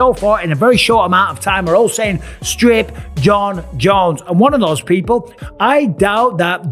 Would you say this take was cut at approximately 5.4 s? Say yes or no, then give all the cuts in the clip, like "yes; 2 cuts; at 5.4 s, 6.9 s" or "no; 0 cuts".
yes; 1 cut; at 5.4 s